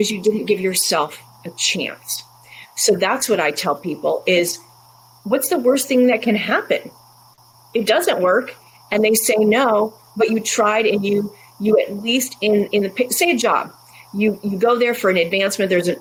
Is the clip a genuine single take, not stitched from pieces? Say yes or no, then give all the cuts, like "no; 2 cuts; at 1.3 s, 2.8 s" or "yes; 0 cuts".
yes; 0 cuts